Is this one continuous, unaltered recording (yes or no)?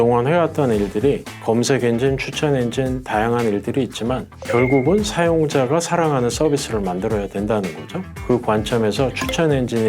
no